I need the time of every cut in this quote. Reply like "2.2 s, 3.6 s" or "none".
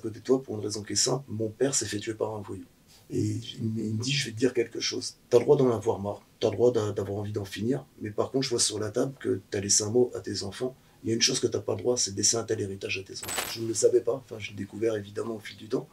13.5 s